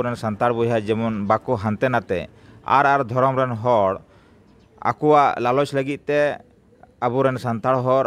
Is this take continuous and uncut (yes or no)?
yes